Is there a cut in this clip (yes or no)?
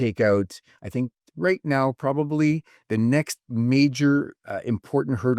no